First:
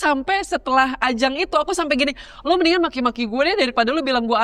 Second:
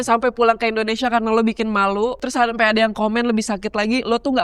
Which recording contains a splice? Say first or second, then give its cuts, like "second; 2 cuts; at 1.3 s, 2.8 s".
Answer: second; 1 cut; at 2.2 s